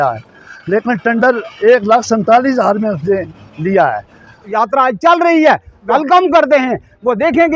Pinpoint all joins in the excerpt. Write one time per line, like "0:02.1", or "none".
0:04.5
0:05.9